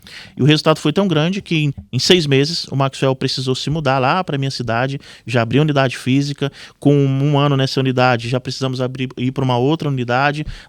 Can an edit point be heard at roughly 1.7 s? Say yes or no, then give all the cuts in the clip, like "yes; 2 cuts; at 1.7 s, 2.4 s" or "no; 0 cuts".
yes; 1 cut; at 1.7 s